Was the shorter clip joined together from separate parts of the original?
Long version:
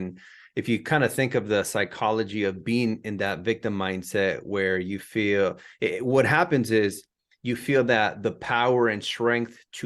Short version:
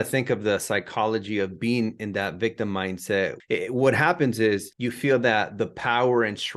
yes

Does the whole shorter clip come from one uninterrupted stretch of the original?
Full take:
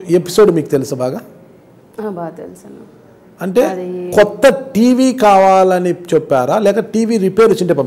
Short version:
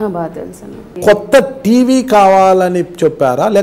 no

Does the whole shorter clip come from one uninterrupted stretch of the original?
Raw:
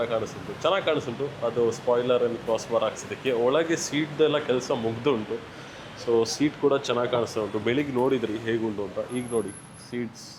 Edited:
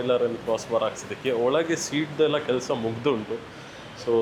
yes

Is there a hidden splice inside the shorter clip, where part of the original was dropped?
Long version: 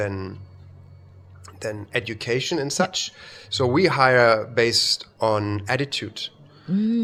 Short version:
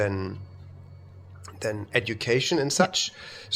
no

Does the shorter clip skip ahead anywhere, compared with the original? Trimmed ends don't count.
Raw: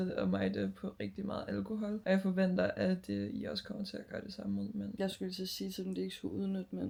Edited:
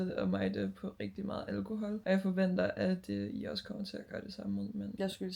no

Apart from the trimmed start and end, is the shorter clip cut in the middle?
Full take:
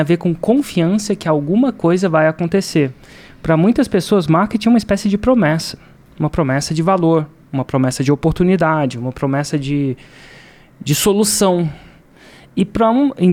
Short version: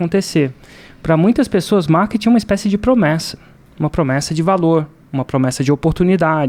no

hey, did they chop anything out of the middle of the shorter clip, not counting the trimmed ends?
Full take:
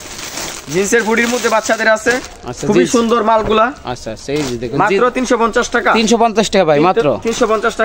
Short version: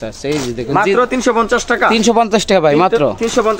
no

